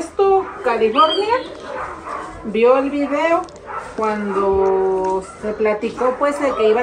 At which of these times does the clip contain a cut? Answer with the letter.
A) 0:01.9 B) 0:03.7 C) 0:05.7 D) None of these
D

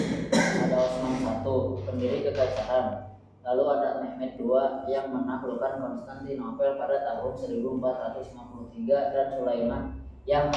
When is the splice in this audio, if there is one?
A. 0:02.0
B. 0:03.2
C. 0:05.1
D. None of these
D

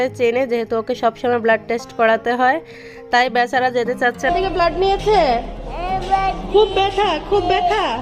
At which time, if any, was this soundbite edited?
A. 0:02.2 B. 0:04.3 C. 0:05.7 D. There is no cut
B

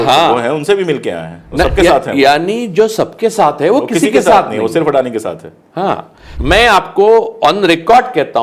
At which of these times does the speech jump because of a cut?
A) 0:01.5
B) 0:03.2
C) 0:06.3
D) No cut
C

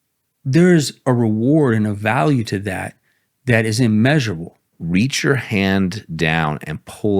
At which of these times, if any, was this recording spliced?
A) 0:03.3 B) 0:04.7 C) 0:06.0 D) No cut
B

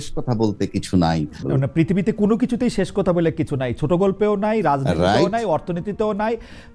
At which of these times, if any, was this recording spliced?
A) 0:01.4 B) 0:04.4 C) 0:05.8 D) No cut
A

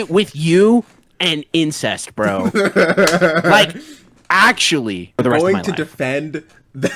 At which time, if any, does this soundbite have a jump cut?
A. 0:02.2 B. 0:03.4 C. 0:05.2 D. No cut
C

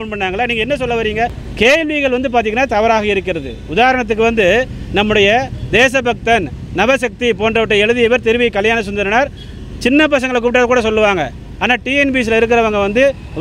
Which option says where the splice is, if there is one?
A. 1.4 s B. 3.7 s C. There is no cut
A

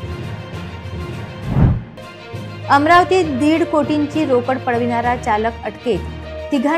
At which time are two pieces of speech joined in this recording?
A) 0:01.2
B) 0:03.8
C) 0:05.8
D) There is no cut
D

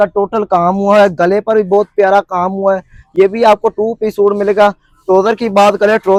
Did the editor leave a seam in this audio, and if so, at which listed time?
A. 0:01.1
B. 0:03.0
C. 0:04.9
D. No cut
D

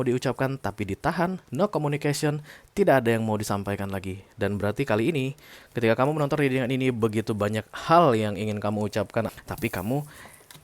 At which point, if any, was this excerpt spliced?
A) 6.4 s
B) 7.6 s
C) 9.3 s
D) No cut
C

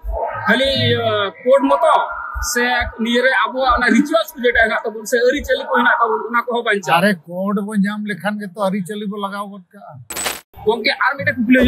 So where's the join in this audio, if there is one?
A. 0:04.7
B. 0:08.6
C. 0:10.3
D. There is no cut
C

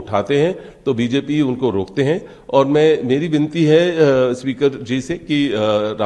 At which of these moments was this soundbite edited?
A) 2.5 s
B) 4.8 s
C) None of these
C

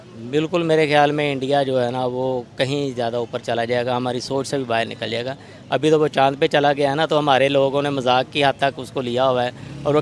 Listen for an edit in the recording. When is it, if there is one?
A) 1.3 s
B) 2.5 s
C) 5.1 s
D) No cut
D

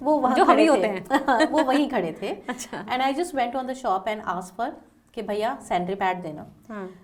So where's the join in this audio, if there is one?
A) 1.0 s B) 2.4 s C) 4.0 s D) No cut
D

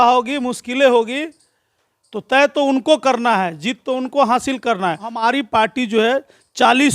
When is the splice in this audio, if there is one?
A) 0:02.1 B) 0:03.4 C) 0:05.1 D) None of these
C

